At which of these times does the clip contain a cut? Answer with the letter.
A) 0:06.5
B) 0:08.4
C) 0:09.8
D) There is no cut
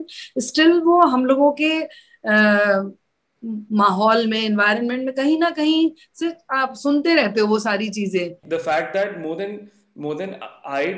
B